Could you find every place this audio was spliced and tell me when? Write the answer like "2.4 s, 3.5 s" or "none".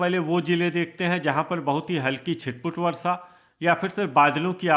none